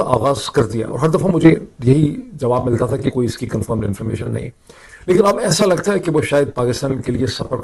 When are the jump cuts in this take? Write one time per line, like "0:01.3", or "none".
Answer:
none